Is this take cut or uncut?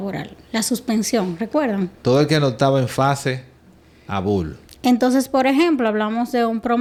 uncut